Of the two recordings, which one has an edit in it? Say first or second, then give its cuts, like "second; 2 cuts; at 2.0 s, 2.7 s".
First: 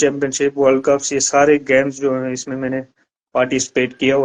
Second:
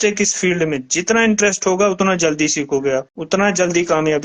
second; 1 cut; at 3.1 s